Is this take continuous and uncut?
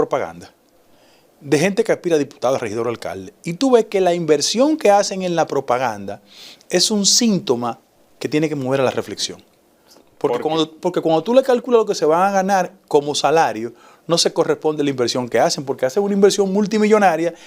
yes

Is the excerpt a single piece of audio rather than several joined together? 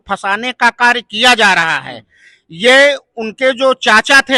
yes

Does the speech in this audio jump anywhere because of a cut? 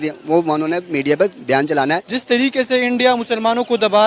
yes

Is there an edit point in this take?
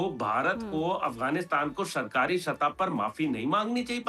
no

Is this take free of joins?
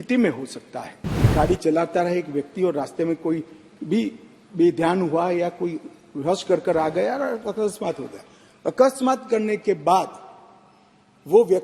no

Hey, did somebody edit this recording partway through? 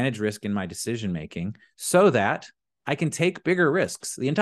no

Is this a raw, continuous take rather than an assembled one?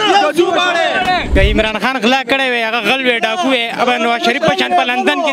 yes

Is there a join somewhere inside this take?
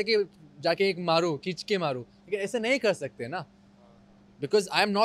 no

